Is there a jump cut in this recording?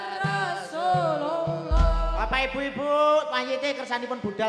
no; 0 cuts

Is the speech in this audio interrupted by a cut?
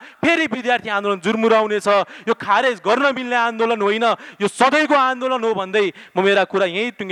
no; 0 cuts

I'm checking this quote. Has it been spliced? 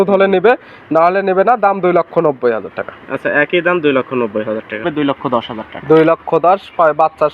yes; 1 cut; at 4.8 s

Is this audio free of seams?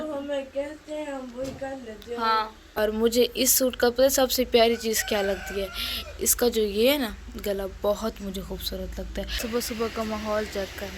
no; 2 cuts; at 2.8 s, 9.3 s

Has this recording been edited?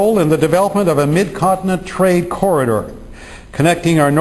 yes; 1 cut; at 3.0 s

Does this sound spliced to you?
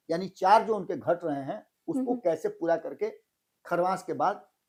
no; 0 cuts

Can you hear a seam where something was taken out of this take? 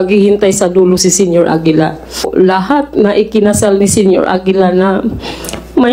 yes; 1 cut; at 2.3 s

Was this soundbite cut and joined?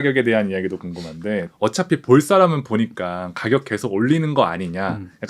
yes; 1 cut; at 1.5 s

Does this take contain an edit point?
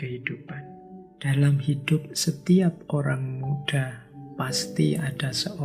yes; 1 cut; at 1.1 s

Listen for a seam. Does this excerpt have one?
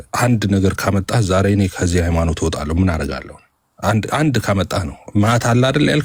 no; 0 cuts

